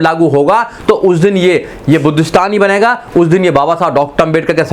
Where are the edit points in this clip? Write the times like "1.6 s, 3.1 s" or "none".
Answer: none